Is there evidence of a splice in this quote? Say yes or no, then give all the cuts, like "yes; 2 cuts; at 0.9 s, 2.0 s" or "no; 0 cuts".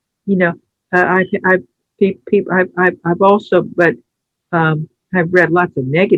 no; 0 cuts